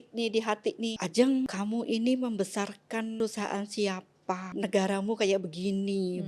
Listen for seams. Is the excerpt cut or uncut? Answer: cut